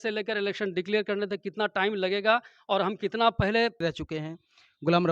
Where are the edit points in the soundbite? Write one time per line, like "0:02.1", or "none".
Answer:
0:03.8